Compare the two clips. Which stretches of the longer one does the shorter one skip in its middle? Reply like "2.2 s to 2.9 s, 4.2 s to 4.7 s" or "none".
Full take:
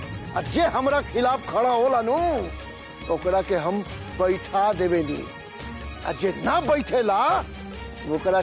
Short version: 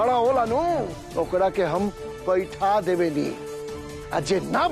2.6 s to 2.9 s